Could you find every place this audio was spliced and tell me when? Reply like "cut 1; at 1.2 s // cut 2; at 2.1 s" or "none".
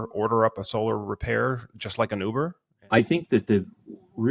cut 1; at 2.7 s